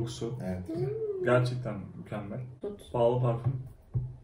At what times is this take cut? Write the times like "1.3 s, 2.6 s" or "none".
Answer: 2.6 s